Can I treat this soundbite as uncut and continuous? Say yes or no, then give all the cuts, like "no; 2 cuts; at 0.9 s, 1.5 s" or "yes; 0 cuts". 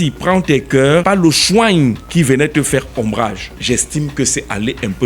no; 3 cuts; at 1.0 s, 2.0 s, 3.5 s